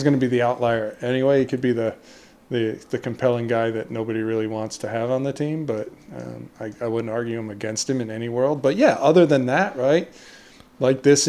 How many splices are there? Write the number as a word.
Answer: zero